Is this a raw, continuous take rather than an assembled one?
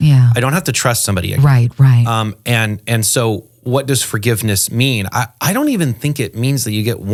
yes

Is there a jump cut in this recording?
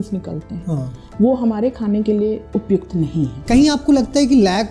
yes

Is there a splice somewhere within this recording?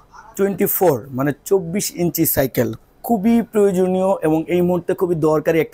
no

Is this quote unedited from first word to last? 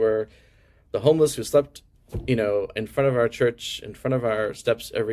yes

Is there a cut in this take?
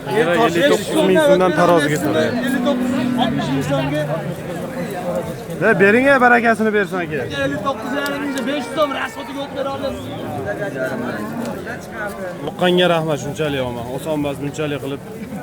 yes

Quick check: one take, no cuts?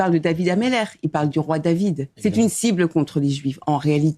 yes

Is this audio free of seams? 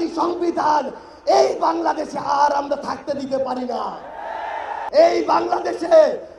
no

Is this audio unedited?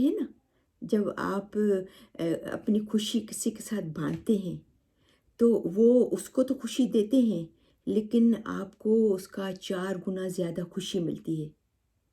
yes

